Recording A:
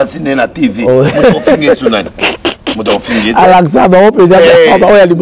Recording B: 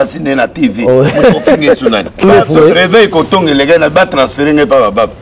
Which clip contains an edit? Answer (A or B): B